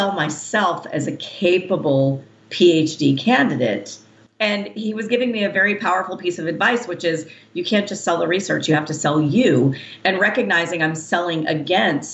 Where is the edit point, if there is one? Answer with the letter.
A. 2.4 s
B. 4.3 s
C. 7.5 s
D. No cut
B